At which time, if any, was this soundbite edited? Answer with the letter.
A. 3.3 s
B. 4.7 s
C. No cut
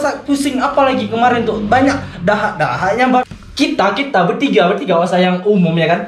A